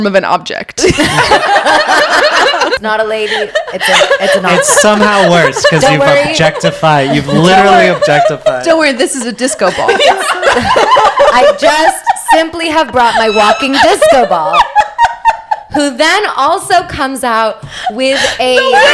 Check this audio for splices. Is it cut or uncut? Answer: cut